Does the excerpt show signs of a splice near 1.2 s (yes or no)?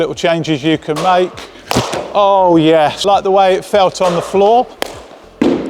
no